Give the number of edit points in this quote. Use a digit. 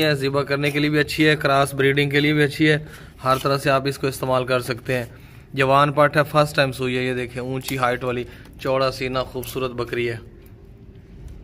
0